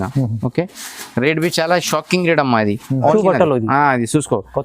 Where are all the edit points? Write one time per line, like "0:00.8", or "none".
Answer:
0:03.1